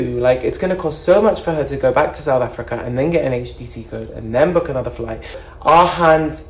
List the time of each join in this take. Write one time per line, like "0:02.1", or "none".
0:05.4